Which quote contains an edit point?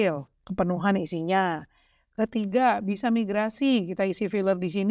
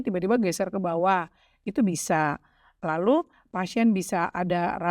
second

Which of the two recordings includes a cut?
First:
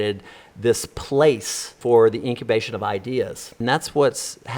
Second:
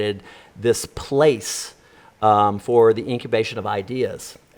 first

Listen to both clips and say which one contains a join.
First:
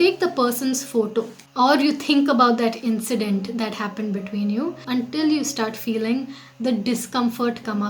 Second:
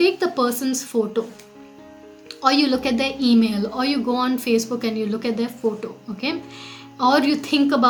first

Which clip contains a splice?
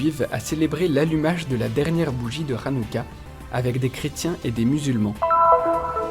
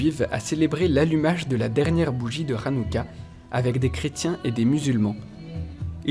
first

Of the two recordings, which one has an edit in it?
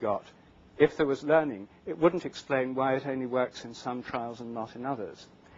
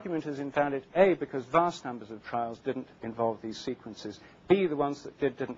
second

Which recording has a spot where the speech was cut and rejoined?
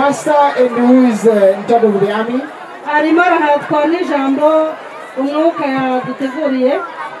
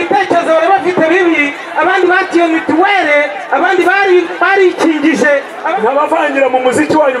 second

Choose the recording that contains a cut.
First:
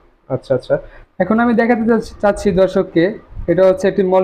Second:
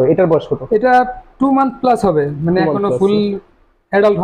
first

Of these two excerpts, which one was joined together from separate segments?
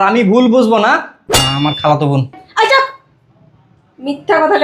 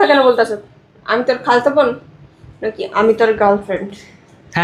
first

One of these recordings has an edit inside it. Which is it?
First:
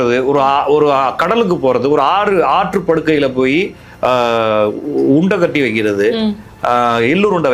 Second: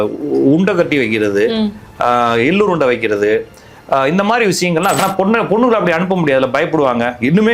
second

